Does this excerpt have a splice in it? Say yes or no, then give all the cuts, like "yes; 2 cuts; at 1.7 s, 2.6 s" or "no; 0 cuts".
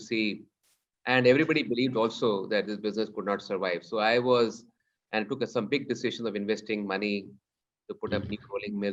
no; 0 cuts